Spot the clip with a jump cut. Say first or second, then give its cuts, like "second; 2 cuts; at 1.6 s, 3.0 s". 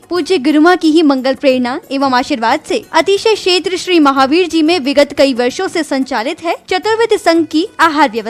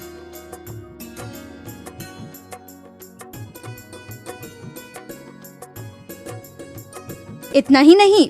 second; 1 cut; at 3.7 s